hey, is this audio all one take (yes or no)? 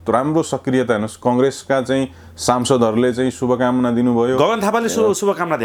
yes